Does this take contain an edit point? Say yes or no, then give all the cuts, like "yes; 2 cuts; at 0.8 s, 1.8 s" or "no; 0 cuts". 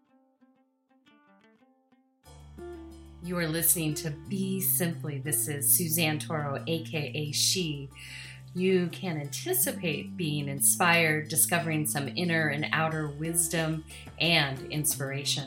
yes; 1 cut; at 3.2 s